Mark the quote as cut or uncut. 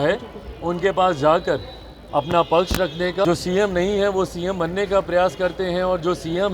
cut